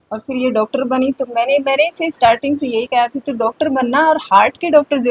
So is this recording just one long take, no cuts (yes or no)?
yes